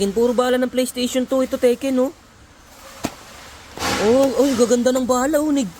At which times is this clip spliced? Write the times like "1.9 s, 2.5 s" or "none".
none